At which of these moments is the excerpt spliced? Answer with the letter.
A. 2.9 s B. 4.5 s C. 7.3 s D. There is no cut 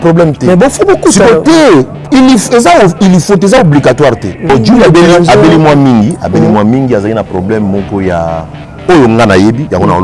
B